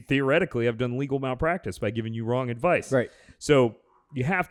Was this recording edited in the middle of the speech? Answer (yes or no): no